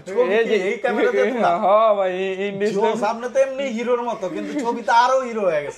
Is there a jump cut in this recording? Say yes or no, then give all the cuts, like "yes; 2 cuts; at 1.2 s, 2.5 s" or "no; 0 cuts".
no; 0 cuts